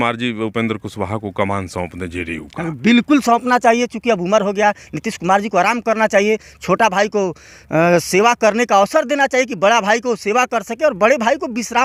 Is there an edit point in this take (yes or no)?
no